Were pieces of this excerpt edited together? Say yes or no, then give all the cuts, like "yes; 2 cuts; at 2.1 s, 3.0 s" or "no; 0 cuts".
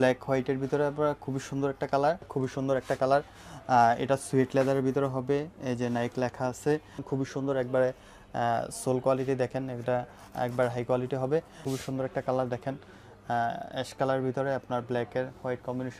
yes; 3 cuts; at 2.3 s, 7.0 s, 11.6 s